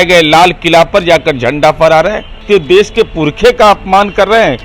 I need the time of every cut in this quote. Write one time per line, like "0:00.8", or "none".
0:02.3

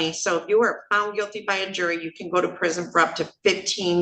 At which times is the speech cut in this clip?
none

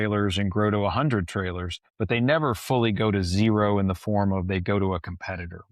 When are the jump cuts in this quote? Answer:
none

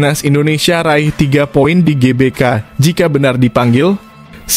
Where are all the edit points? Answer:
none

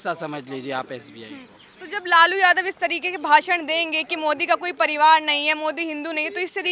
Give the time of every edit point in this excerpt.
none

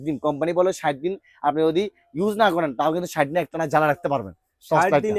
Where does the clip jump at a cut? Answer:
none

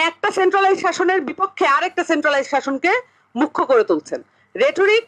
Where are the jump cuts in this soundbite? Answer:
none

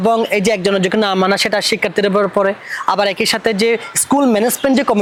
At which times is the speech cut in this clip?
none

